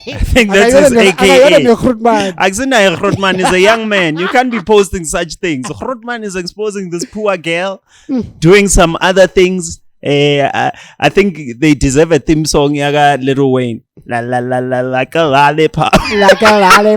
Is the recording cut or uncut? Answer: uncut